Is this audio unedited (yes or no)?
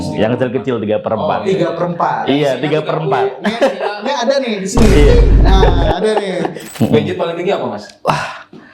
no